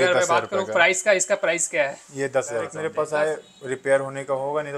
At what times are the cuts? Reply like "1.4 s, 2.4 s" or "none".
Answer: 2.8 s